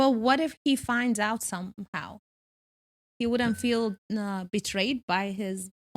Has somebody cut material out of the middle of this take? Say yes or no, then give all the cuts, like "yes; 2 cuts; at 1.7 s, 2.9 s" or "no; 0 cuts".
no; 0 cuts